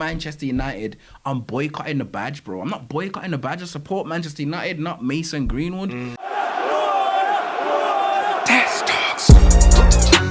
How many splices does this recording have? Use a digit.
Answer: 1